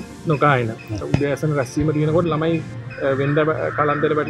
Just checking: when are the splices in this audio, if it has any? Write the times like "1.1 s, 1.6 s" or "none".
1.0 s

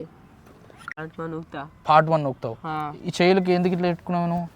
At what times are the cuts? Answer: 1.0 s

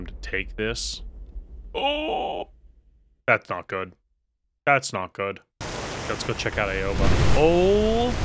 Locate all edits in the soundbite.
5.6 s

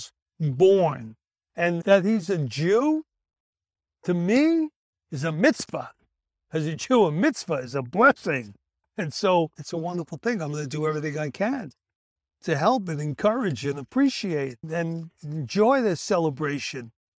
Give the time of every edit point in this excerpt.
8.8 s

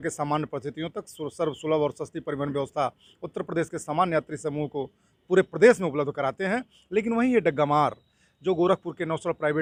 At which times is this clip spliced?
none

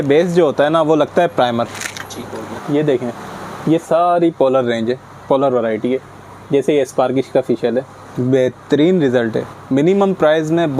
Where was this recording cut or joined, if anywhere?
2.5 s

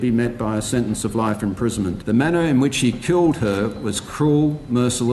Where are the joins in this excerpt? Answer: 2.0 s

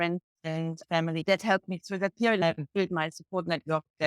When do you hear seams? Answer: 1.2 s, 2.4 s

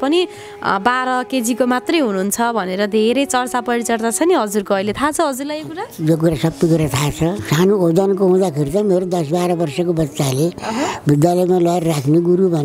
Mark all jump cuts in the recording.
7.5 s

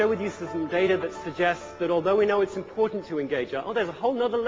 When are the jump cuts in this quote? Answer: none

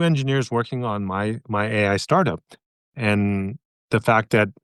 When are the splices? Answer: 2.9 s

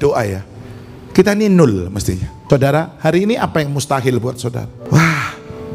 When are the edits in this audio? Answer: 2.3 s, 4.8 s

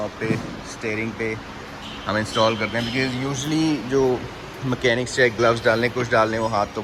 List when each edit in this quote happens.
none

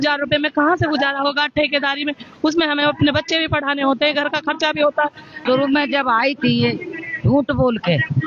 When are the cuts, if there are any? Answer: 5.3 s

